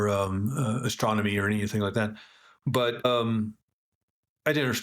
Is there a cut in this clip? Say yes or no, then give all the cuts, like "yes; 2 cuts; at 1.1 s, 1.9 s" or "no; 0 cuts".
yes; 1 cut; at 3.0 s